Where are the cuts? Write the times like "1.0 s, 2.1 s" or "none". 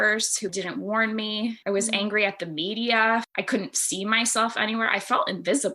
1.6 s, 3.3 s